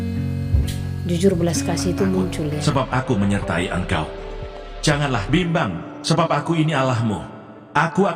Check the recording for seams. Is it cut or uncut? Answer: cut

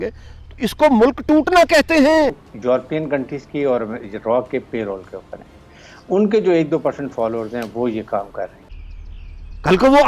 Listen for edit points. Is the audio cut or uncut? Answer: cut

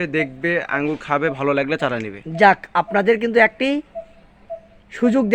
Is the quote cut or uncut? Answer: uncut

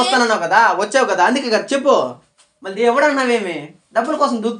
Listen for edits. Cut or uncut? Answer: uncut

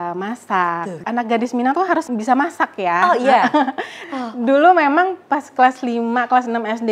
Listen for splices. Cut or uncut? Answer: cut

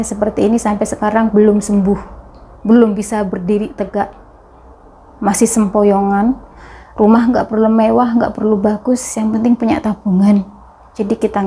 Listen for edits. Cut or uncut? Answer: cut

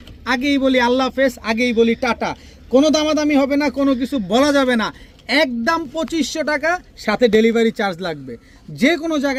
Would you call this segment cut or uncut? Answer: uncut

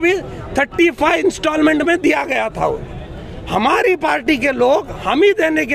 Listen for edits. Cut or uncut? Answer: uncut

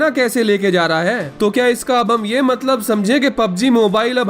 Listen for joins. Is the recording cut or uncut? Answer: cut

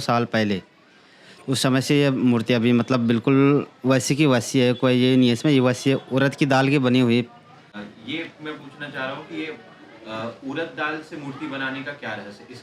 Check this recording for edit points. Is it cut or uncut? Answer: uncut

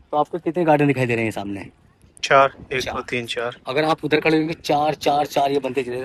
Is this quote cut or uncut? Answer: uncut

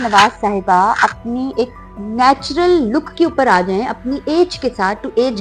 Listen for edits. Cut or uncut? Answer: uncut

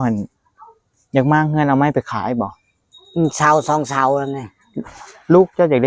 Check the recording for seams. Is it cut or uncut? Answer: uncut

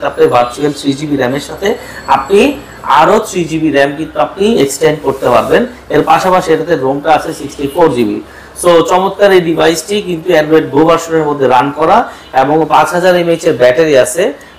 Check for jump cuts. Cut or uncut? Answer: uncut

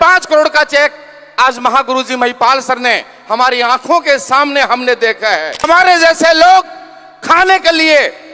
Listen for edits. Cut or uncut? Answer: cut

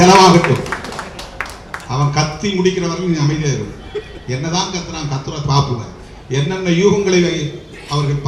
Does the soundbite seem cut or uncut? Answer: uncut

